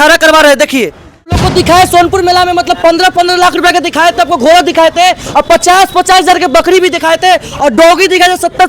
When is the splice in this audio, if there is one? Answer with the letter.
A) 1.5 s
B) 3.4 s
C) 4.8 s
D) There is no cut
A